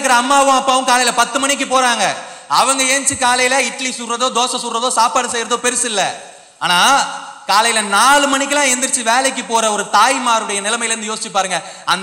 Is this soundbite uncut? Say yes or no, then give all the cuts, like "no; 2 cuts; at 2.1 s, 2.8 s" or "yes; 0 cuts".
yes; 0 cuts